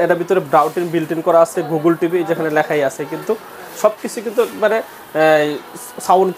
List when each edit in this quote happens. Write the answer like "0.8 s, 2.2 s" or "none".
none

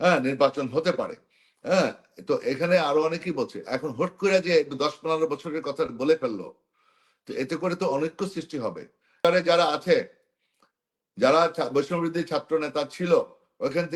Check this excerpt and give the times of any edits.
9.2 s

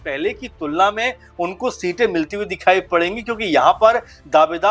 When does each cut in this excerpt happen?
none

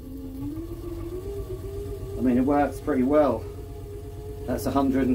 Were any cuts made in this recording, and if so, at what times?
none

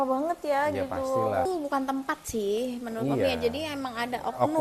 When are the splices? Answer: 1.5 s

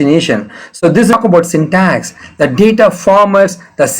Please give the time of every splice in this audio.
1.1 s

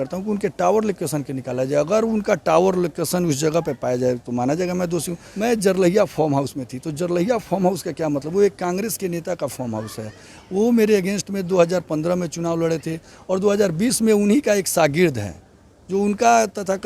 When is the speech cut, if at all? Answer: 5.2 s

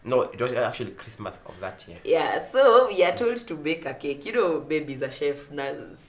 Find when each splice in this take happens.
none

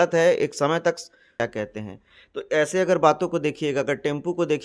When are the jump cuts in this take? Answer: 1.4 s

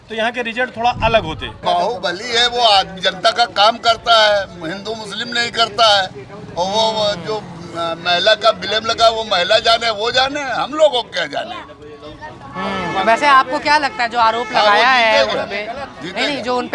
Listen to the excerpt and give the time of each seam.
1.6 s

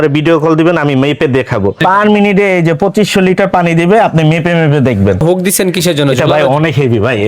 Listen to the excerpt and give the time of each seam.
1.8 s, 5.2 s

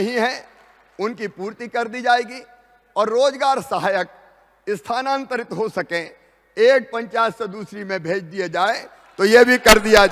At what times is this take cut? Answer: none

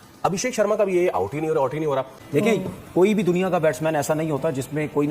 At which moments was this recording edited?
2.1 s

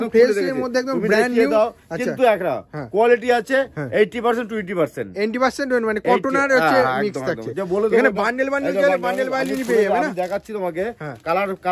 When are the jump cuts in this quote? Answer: none

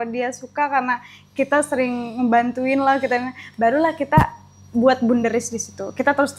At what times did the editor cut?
none

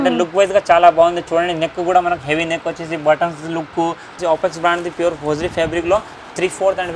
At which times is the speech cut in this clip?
4.1 s

